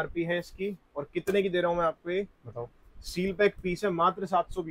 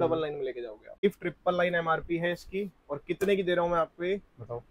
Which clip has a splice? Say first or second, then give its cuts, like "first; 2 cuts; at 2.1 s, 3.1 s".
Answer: second; 1 cut; at 1.0 s